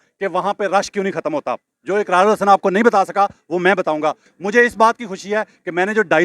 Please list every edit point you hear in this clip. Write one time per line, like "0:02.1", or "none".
0:04.3